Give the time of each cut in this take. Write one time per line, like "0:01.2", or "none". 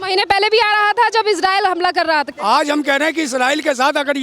0:02.3